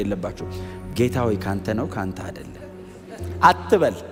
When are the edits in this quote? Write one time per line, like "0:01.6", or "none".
none